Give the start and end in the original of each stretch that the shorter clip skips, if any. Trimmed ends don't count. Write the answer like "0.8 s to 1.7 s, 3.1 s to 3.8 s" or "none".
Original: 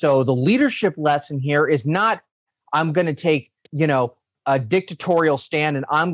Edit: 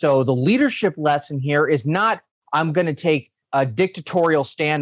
2.3 s to 2.5 s, 3.6 s to 4.3 s